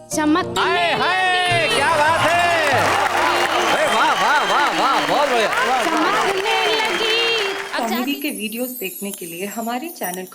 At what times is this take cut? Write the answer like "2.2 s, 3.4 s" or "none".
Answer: 7.7 s

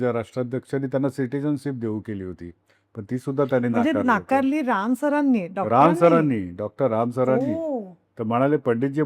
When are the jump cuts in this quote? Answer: none

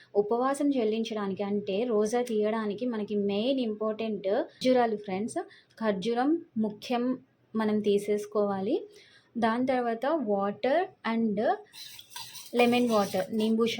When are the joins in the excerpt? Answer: 4.5 s

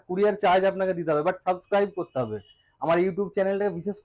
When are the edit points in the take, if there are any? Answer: none

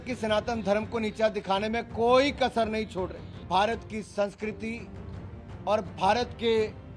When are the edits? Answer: 3.4 s

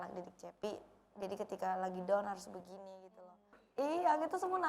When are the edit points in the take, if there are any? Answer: 3.6 s

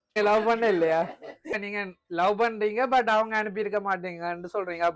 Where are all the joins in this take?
1.6 s

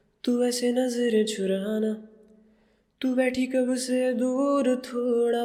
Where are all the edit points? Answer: none

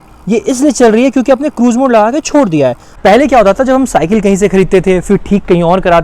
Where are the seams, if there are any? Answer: 2.9 s

